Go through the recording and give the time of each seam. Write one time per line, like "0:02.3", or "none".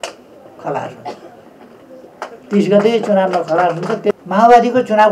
0:04.1